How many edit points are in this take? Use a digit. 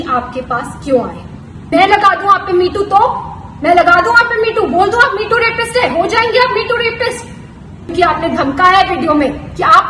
2